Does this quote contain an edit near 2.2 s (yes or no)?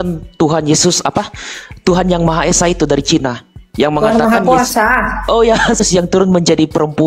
no